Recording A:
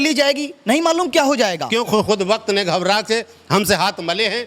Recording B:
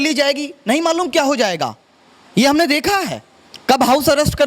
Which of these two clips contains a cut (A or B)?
A